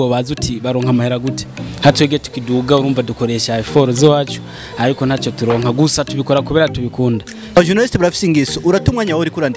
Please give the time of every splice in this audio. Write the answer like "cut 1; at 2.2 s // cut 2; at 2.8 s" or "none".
cut 1; at 7.6 s